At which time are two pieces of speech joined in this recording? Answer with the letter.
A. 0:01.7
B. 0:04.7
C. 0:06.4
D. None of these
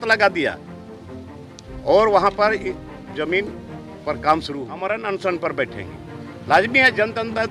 B